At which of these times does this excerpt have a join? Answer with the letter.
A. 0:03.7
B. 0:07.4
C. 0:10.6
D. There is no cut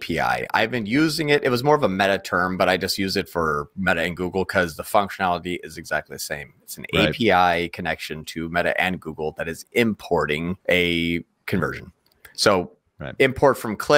C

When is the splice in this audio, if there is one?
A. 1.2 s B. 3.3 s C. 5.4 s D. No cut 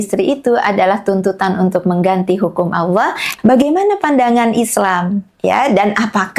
B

